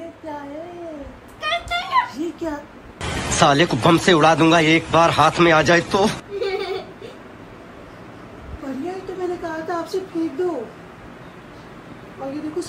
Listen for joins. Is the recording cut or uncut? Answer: uncut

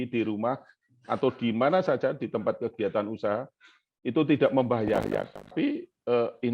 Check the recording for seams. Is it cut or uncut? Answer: cut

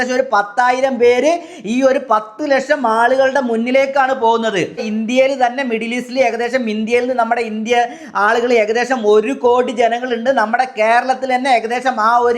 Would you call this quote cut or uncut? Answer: cut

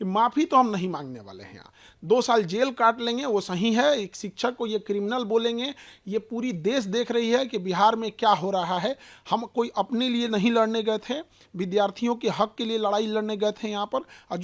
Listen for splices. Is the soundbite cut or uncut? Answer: uncut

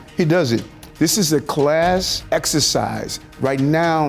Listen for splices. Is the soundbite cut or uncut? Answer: cut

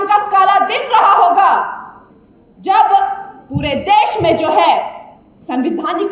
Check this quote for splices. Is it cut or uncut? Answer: uncut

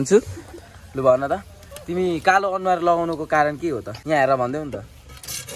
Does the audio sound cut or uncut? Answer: cut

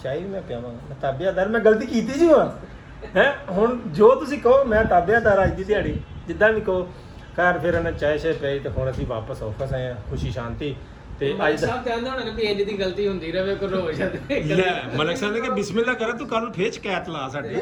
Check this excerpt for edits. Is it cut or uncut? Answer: uncut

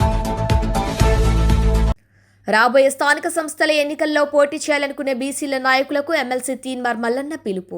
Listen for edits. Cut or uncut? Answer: cut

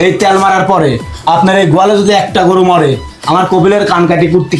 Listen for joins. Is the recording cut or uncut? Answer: uncut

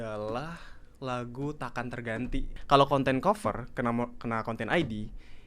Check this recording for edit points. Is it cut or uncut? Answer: cut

